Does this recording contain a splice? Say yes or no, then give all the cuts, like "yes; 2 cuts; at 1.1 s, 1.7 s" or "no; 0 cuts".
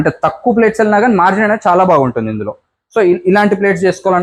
no; 0 cuts